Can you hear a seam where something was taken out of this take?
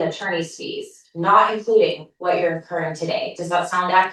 no; 0 cuts

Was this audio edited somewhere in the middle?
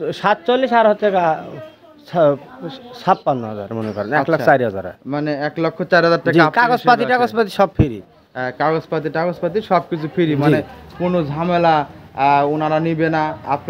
no; 0 cuts

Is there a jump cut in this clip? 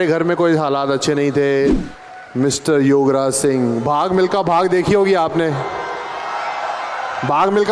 yes; 1 cut; at 1.8 s

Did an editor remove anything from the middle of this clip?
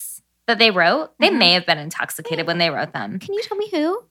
no; 0 cuts

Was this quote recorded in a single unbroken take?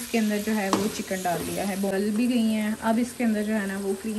no; 1 cut; at 1.9 s

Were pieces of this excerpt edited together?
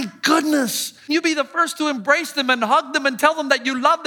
yes; 1 cut; at 1.1 s

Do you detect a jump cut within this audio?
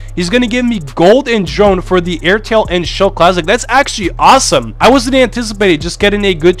no; 0 cuts

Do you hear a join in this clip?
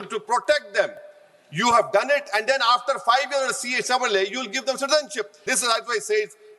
yes; 1 cut; at 5.5 s

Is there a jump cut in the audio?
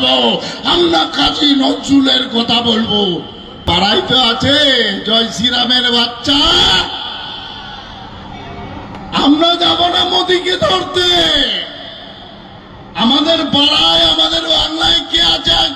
yes; 1 cut; at 3.6 s

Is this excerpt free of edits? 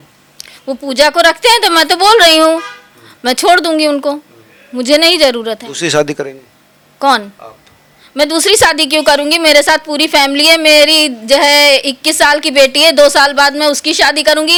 yes; 0 cuts

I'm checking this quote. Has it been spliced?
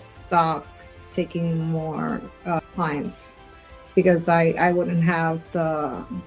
no; 0 cuts

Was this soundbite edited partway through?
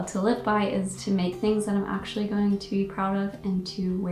no; 0 cuts

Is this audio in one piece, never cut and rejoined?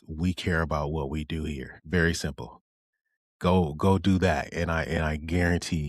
no; 1 cut; at 1.7 s

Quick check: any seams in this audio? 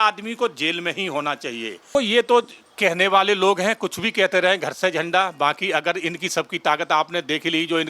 yes; 1 cut; at 1.9 s

